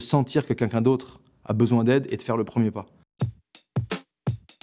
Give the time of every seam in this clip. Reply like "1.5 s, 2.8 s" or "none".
3.0 s